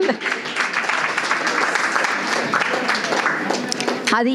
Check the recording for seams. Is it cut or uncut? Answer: uncut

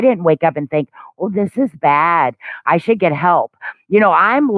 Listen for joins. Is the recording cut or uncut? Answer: uncut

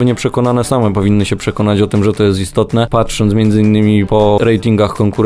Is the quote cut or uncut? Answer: cut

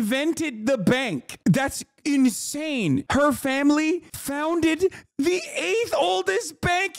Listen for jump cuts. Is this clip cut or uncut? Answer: uncut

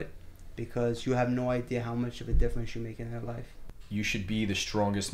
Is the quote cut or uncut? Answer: cut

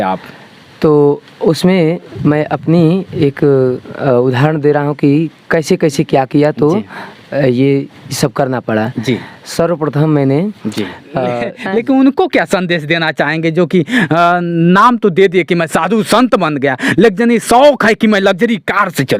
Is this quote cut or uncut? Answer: cut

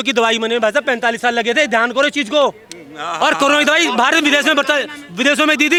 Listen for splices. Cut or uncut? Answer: uncut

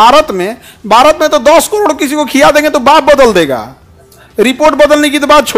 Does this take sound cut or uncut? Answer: uncut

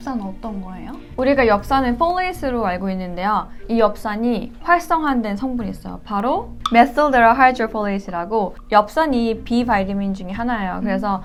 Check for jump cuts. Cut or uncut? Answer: uncut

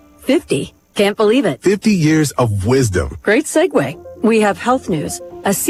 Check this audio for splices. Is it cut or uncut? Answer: uncut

